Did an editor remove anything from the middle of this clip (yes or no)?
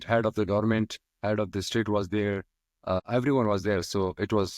yes